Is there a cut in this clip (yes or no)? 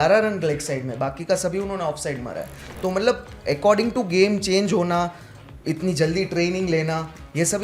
no